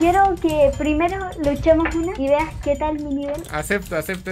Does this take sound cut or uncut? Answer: cut